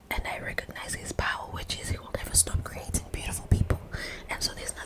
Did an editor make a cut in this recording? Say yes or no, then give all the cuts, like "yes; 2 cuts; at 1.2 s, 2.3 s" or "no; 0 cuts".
no; 0 cuts